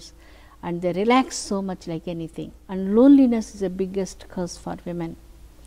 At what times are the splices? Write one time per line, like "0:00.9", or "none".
0:02.6